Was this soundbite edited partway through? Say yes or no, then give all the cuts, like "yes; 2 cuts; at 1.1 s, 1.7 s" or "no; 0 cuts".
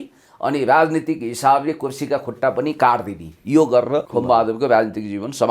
yes; 1 cut; at 4.1 s